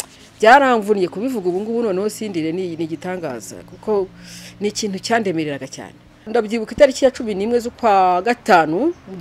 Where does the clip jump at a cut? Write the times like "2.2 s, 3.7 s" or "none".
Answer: 6.3 s